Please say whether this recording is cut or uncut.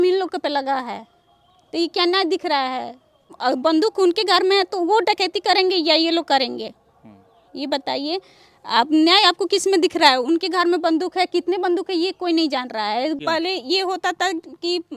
cut